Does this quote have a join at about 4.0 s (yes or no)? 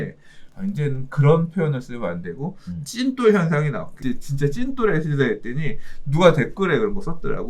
yes